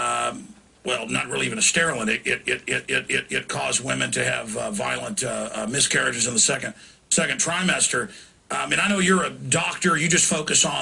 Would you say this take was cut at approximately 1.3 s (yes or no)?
yes